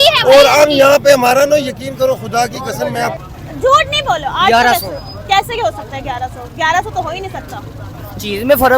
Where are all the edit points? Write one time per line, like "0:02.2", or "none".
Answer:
0:03.2